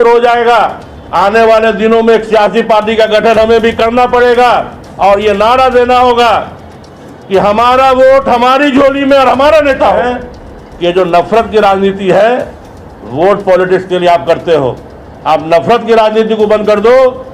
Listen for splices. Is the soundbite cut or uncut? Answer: cut